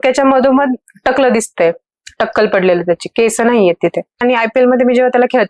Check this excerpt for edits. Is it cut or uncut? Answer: cut